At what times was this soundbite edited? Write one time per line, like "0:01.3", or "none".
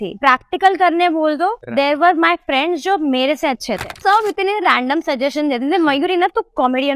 0:04.0